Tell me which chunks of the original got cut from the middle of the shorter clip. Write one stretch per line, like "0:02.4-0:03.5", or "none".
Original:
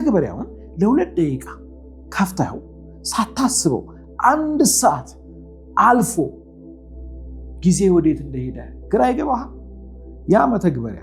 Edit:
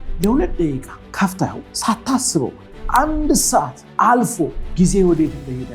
0:01.6-0:02.0
0:02.7-0:03.0
0:05.1-0:05.6
0:06.4-0:07.5